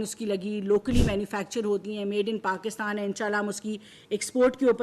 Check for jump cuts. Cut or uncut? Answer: uncut